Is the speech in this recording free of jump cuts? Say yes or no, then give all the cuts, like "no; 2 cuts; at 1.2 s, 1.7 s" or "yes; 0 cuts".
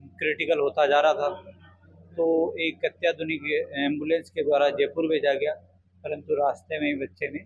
yes; 0 cuts